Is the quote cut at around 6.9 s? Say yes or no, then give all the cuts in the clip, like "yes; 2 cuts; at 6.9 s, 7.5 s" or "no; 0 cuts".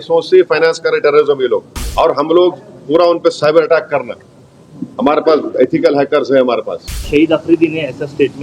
yes; 2 cuts; at 1.8 s, 6.9 s